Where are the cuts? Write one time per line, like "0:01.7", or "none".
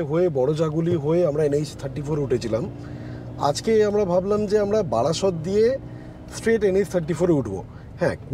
none